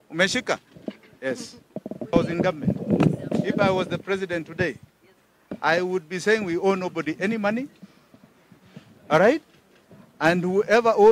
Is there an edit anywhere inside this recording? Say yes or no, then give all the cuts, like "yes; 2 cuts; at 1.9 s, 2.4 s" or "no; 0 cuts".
yes; 1 cut; at 2.1 s